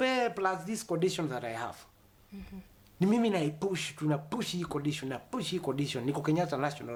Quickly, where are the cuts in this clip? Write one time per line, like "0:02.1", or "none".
none